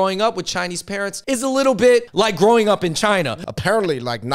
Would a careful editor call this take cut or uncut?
cut